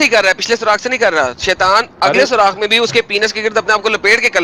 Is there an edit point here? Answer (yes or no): no